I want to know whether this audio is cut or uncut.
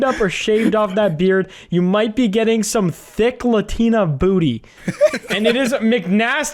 uncut